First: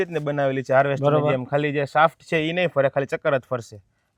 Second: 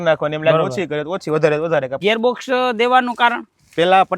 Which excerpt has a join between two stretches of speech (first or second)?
second